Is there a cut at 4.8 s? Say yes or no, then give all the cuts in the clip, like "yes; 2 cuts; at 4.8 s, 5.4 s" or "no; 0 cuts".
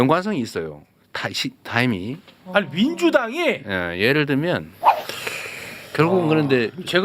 yes; 1 cut; at 4.8 s